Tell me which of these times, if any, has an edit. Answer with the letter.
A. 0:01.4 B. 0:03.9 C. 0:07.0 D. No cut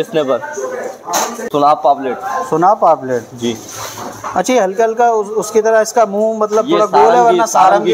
A